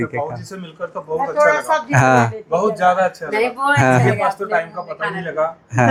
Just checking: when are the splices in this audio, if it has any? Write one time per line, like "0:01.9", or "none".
none